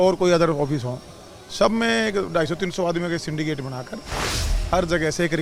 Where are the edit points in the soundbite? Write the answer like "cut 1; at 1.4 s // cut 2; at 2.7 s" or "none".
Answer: none